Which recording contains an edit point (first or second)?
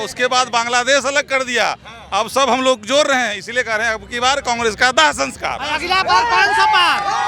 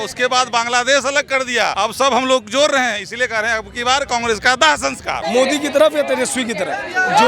second